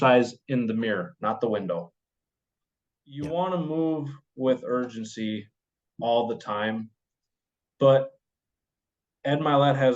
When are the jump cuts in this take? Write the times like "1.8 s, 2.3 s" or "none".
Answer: 3.3 s